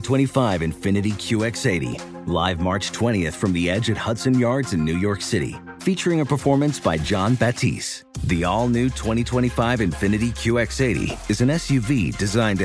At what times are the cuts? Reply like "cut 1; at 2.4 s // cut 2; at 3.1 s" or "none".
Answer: none